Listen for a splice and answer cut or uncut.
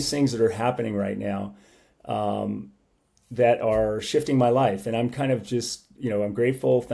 uncut